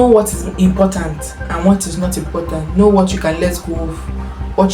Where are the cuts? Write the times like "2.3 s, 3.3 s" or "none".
none